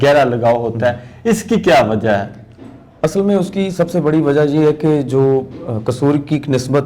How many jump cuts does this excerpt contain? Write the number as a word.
zero